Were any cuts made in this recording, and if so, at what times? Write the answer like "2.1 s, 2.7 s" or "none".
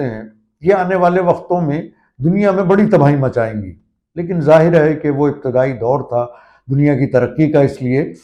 none